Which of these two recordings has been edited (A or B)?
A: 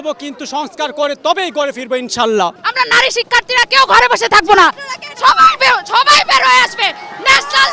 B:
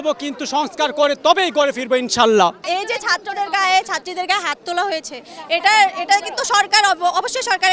A